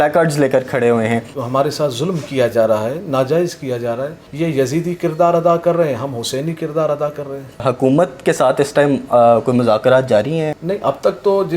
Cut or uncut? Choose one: cut